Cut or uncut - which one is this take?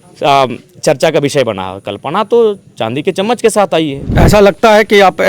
cut